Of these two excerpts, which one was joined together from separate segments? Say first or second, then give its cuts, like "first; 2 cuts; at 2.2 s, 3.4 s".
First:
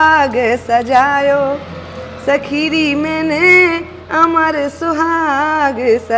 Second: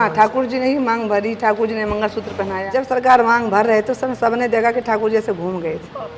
second; 1 cut; at 2.7 s